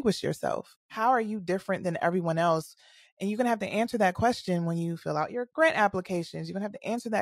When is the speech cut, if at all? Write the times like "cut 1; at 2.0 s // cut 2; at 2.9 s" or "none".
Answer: none